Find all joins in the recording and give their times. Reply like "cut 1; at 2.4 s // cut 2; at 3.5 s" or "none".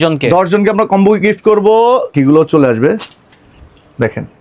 cut 1; at 2.1 s